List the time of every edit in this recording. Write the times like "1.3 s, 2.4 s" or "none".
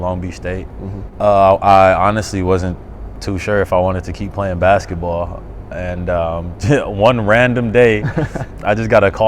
1.0 s